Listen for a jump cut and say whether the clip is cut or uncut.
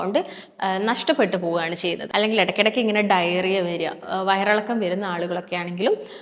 cut